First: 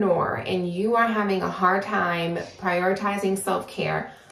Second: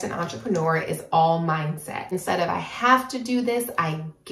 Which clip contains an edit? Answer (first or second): second